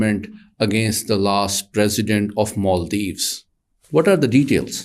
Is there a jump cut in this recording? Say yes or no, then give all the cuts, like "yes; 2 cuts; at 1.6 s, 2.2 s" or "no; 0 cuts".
no; 0 cuts